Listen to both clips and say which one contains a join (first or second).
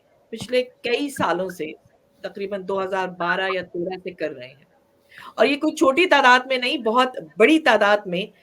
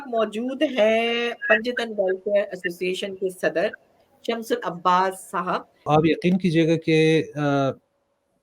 second